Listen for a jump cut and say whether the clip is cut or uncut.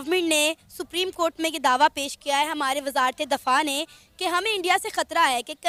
uncut